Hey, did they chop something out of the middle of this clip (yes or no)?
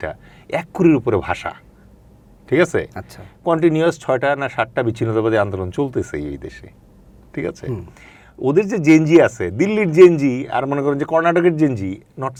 no